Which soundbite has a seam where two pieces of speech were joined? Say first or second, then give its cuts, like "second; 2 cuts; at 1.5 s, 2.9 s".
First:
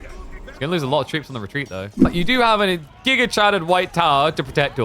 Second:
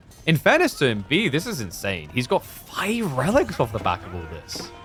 first; 1 cut; at 2.1 s